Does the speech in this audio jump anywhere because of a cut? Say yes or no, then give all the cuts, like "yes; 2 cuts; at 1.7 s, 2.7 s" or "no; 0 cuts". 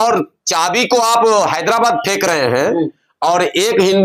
no; 0 cuts